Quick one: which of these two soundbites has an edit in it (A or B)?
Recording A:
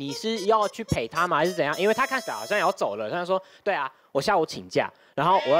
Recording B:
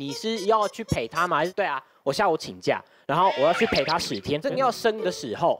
B